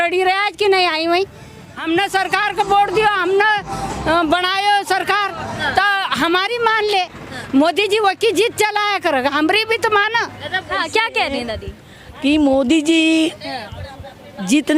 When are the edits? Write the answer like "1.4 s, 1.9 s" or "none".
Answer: 1.8 s, 10.7 s